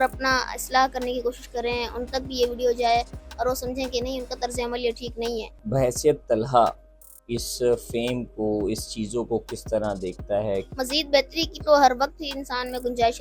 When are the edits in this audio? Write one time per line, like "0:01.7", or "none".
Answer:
0:05.6
0:10.7

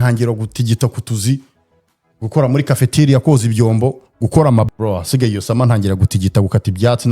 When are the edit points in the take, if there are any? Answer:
0:04.7

